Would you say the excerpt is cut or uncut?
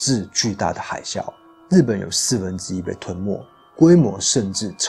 uncut